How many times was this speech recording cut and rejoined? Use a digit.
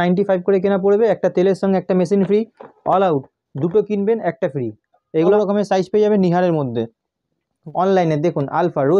2